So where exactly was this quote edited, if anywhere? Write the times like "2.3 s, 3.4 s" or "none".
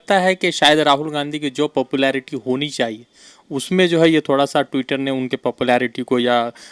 none